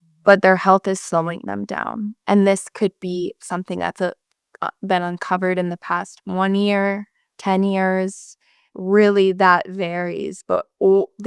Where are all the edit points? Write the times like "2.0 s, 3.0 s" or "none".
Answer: none